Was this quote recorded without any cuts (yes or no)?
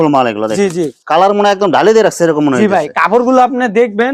yes